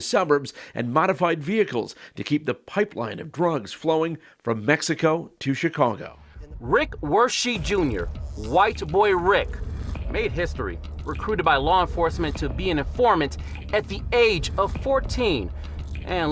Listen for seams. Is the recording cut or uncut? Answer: cut